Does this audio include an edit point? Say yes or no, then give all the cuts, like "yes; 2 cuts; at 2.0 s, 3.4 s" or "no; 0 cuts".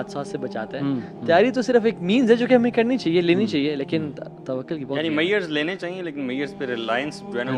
no; 0 cuts